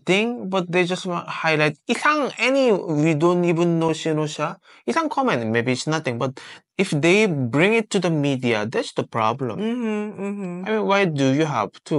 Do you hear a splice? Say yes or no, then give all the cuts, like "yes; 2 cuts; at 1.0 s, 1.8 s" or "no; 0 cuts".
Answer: no; 0 cuts